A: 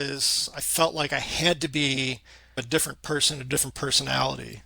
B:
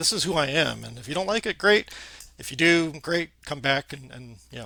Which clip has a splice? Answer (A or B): A